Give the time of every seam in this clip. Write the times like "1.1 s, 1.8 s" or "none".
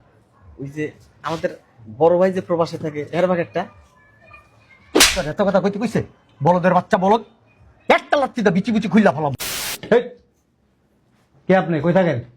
9.7 s